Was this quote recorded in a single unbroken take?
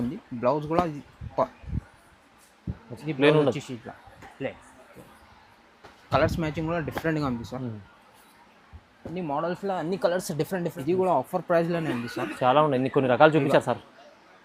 no; 1 cut; at 10.8 s

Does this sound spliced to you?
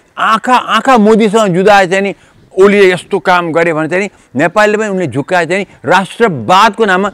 no; 0 cuts

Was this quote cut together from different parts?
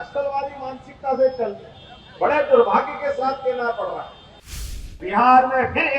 yes; 1 cut; at 4.5 s

